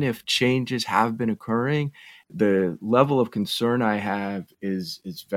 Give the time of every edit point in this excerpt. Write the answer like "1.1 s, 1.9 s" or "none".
2.3 s